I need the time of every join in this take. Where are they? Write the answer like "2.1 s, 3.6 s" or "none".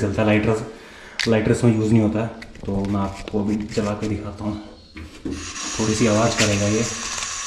none